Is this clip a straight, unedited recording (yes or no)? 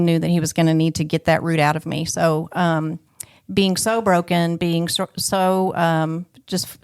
yes